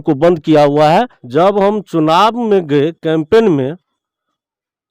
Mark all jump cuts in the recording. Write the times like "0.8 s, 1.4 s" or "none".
1.2 s